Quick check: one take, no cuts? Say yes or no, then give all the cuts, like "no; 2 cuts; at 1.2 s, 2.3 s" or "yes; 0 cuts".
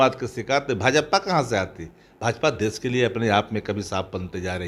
yes; 0 cuts